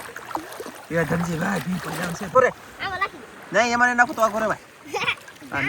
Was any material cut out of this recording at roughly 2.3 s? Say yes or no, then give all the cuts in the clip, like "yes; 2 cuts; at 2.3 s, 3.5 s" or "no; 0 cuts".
yes; 1 cut; at 2.3 s